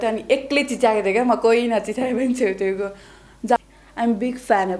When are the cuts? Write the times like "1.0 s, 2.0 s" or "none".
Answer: 3.6 s